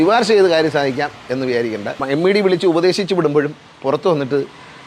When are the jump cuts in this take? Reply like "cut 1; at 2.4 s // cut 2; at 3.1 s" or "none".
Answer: cut 1; at 2.0 s